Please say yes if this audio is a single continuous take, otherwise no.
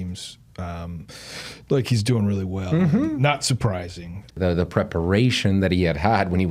no